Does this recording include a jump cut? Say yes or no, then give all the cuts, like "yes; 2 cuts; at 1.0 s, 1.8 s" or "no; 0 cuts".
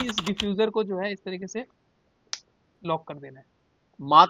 no; 0 cuts